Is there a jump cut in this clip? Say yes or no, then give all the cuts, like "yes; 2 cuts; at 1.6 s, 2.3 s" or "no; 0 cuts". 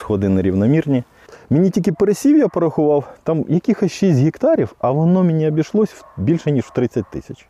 yes; 1 cut; at 1.4 s